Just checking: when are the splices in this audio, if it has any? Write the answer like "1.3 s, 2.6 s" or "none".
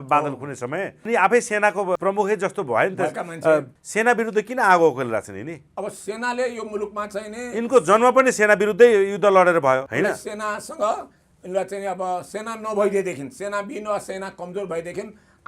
1.1 s, 2.0 s, 3.8 s, 9.9 s